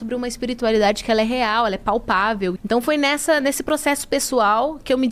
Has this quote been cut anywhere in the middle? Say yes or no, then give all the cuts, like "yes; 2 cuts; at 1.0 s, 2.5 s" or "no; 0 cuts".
yes; 1 cut; at 2.5 s